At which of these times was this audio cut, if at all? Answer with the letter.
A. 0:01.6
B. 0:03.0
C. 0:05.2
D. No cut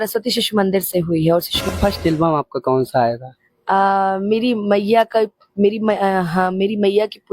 A